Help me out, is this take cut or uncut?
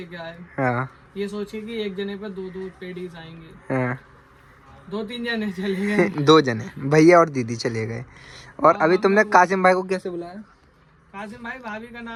uncut